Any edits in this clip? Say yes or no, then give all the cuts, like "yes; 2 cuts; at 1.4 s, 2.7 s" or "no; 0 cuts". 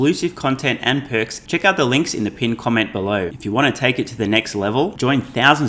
yes; 2 cuts; at 1.4 s, 3.3 s